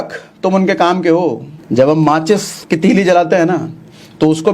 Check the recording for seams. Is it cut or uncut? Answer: cut